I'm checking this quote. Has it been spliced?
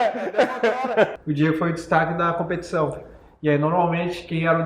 yes; 1 cut; at 1.2 s

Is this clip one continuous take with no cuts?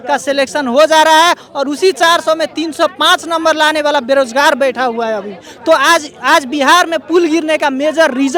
yes; 0 cuts

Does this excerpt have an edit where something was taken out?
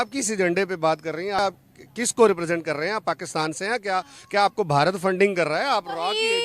yes; 1 cut; at 1.4 s

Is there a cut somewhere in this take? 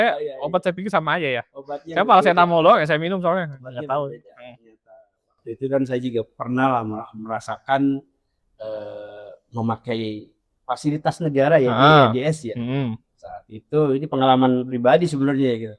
no; 0 cuts

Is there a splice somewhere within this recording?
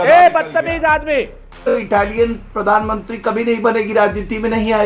yes; 1 cut; at 1.8 s

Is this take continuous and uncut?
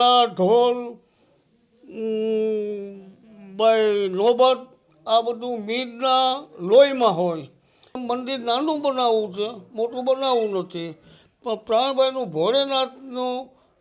no; 1 cut; at 8.0 s

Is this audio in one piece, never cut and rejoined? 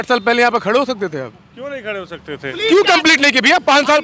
no; 1 cut; at 2.5 s

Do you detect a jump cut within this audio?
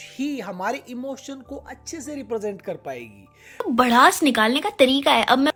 no; 0 cuts

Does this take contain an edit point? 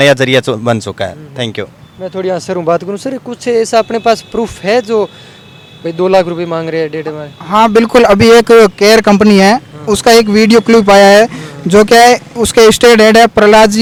no; 0 cuts

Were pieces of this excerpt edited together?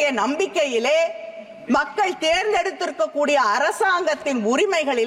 no; 0 cuts

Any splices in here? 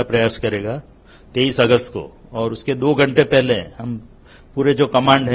no; 0 cuts

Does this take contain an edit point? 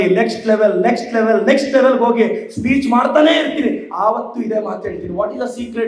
no; 0 cuts

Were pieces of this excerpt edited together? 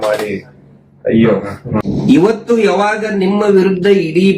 yes; 1 cut; at 1.8 s

